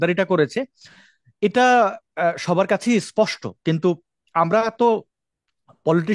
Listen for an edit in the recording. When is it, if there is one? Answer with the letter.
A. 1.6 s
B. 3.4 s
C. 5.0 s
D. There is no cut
D